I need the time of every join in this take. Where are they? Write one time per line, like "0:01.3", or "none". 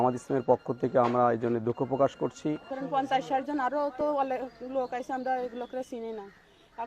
0:02.7